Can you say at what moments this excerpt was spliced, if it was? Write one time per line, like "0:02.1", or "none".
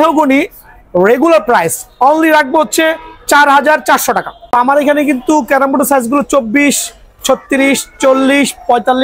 0:04.3